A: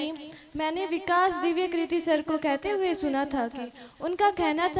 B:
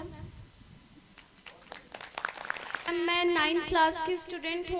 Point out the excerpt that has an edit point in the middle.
B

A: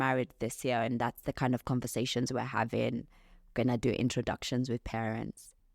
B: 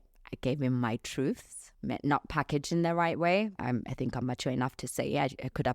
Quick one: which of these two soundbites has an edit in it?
B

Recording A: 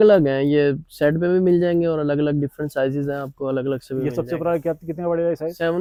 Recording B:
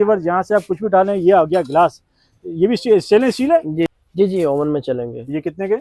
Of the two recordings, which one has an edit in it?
B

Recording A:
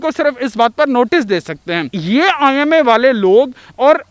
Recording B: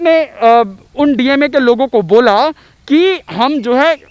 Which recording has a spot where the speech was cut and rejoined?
A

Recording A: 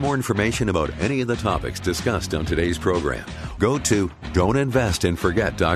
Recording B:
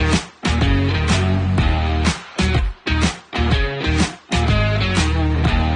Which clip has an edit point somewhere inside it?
A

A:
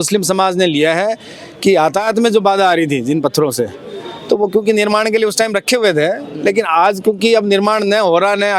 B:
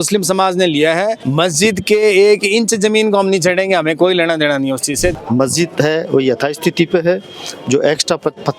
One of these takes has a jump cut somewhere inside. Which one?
B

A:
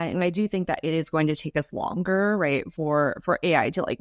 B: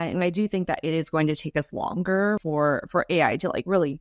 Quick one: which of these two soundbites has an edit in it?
B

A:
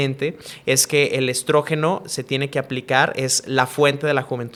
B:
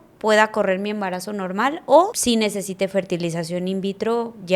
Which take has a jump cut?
B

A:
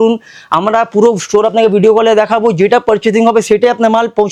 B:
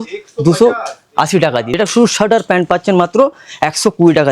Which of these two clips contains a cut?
B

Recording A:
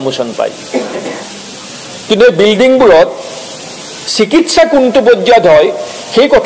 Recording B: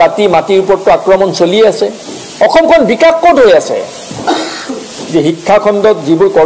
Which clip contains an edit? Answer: B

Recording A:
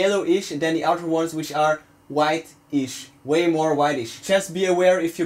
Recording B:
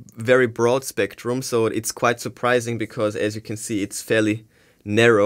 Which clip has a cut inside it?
A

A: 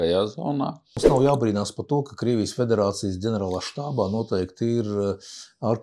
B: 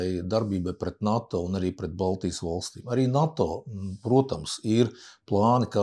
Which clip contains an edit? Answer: A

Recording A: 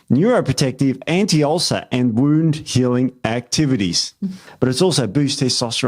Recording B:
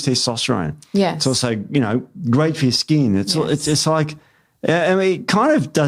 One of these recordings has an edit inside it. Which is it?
A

